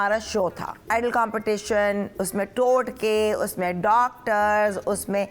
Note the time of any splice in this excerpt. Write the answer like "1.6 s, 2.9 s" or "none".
0.9 s